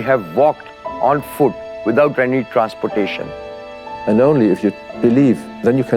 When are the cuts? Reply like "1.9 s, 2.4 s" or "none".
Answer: 3.8 s